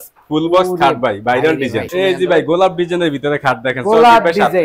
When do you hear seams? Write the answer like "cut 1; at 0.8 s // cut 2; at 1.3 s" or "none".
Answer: cut 1; at 1.9 s